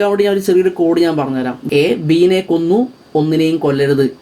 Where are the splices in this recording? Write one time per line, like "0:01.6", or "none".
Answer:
0:01.6